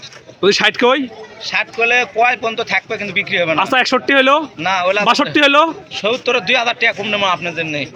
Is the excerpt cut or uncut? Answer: uncut